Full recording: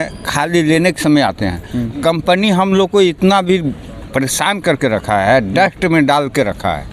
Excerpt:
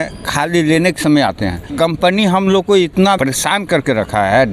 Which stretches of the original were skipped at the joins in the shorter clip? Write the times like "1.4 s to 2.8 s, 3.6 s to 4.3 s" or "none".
1.6 s to 1.9 s, 3.4 s to 4.1 s